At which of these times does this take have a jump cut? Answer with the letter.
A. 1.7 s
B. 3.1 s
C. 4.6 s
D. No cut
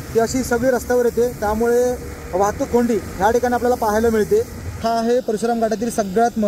C